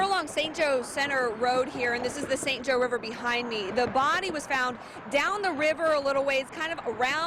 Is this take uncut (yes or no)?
yes